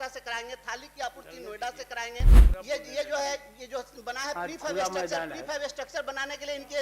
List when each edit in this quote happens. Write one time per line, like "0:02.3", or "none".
0:02.4